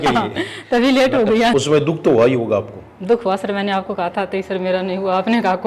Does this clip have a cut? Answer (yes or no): yes